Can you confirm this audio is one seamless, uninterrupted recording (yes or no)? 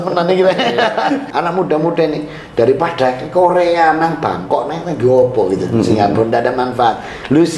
no